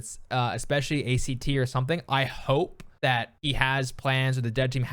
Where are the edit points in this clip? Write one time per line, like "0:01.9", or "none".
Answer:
0:02.8

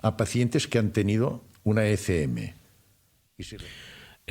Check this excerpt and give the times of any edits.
0:03.2

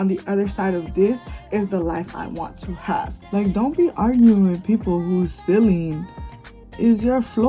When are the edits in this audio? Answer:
0:03.2

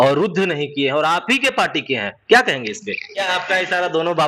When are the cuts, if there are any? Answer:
0:03.3

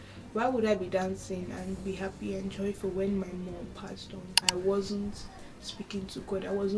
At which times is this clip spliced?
0:04.4

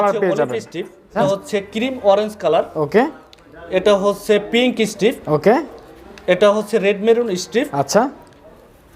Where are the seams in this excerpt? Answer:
0:01.1

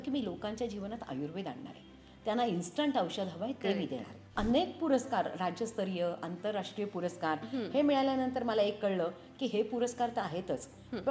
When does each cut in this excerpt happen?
0:04.3

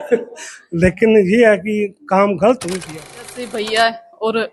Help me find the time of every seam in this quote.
0:03.4

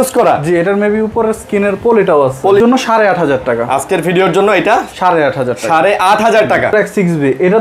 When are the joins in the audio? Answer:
0:02.6
0:06.7

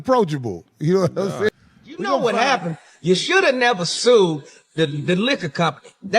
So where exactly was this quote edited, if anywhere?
0:02.2

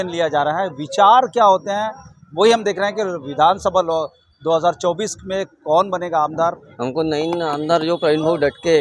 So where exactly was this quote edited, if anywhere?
0:06.7

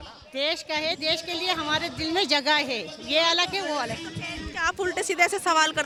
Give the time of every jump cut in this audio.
none

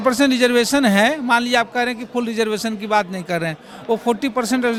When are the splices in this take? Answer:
none

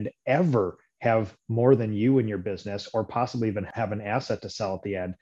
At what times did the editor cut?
0:03.7

